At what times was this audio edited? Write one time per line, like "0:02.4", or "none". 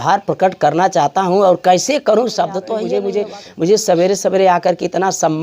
0:02.8